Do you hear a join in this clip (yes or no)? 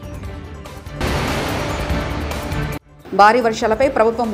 yes